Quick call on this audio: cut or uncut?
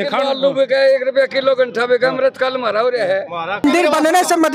cut